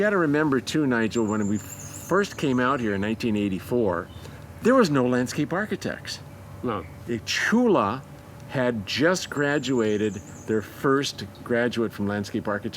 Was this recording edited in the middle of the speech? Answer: no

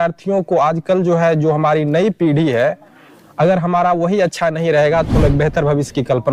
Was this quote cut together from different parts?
no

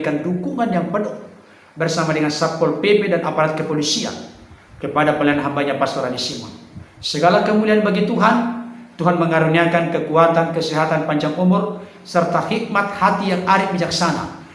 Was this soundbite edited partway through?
no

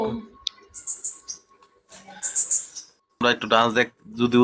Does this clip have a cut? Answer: yes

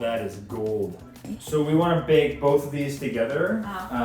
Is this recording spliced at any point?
no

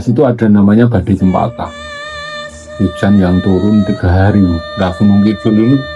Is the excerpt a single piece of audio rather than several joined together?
no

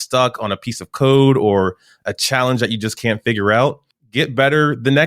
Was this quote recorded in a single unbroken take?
no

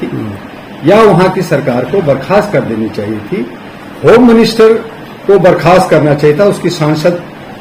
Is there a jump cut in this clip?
no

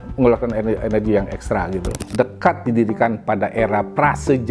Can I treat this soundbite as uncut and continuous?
no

